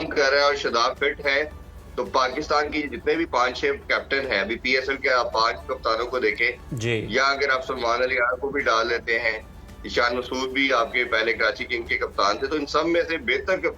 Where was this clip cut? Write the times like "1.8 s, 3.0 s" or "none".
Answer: none